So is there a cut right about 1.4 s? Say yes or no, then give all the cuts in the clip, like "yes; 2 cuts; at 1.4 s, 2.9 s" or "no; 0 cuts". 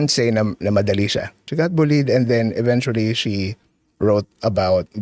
yes; 1 cut; at 1.4 s